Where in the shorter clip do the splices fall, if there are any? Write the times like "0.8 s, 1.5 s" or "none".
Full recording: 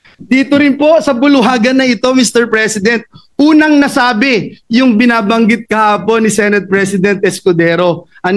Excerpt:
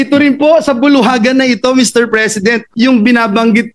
2.7 s